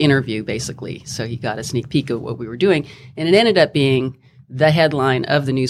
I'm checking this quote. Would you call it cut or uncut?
uncut